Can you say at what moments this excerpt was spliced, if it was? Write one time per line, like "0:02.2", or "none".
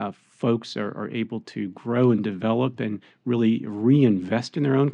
none